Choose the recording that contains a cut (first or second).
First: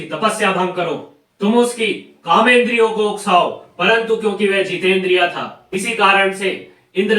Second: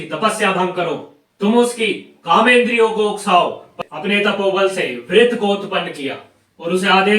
second